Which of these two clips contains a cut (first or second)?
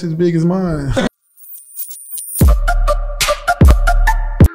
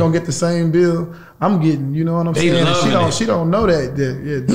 first